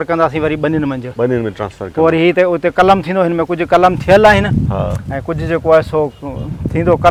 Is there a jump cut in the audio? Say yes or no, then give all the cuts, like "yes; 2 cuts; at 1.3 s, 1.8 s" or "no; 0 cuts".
no; 0 cuts